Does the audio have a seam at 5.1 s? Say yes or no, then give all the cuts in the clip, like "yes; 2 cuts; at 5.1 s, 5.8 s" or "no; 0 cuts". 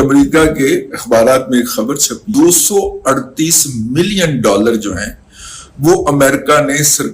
no; 1 cut; at 2.2 s